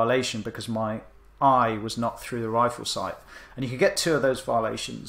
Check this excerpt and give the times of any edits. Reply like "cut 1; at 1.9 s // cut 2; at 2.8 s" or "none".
none